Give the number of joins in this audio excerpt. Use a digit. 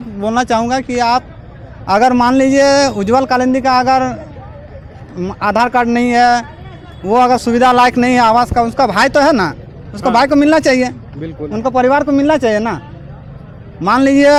0